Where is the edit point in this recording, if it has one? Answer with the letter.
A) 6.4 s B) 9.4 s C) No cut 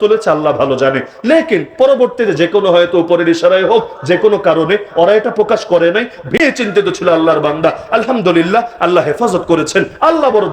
A